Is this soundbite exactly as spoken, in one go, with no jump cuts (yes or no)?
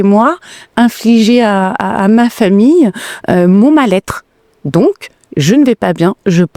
yes